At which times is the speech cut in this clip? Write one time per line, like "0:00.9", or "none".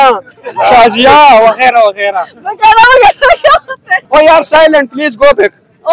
0:04.0